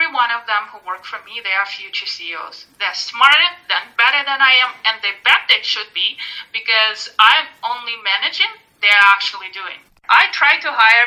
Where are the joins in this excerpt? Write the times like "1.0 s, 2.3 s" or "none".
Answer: 10.0 s